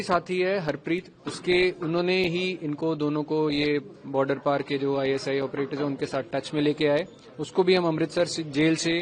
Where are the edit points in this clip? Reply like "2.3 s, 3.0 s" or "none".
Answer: none